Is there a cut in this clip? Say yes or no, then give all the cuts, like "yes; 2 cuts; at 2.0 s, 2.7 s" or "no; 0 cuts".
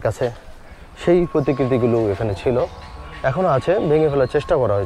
no; 0 cuts